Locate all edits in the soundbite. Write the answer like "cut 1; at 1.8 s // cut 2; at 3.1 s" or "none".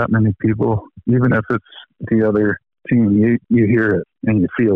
cut 1; at 1.3 s // cut 2; at 2.7 s // cut 3; at 3.7 s